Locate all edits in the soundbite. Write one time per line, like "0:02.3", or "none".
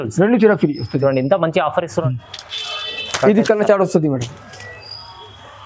0:02.0